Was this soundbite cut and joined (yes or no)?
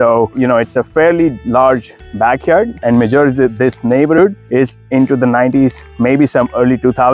yes